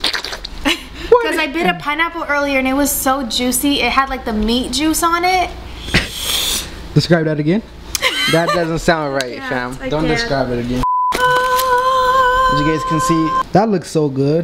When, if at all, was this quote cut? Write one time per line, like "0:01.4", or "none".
0:13.4